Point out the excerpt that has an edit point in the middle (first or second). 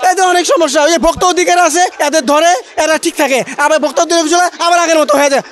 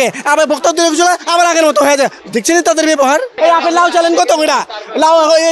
second